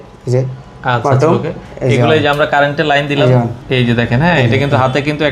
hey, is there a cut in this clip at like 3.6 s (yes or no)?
yes